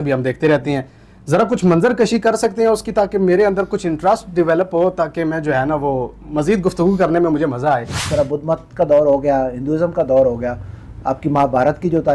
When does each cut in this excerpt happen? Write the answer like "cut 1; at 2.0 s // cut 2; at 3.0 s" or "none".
cut 1; at 8.0 s

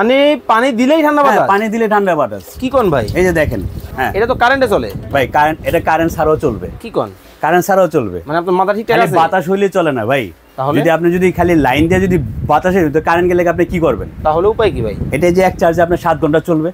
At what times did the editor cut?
cut 1; at 3.8 s

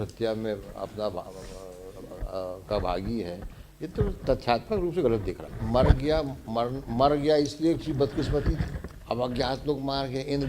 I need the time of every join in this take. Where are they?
cut 1; at 5.6 s // cut 2; at 8.8 s

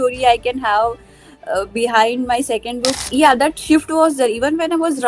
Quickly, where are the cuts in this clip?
cut 1; at 3.0 s

